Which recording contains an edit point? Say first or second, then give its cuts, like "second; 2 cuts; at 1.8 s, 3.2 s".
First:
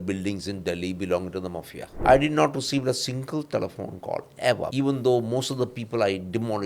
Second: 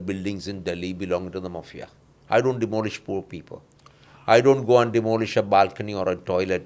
first; 2 cuts; at 1.8 s, 4.7 s